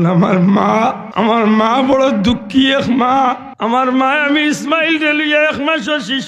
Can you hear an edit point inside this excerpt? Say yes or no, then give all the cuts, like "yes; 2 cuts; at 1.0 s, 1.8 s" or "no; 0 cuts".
yes; 2 cuts; at 1.0 s, 3.5 s